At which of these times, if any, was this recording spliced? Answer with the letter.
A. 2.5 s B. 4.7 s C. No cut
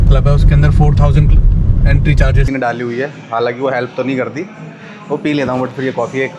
A